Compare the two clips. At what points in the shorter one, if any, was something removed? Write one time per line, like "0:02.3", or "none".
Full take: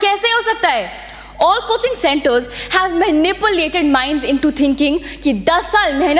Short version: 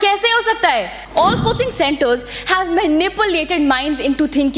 0:01.0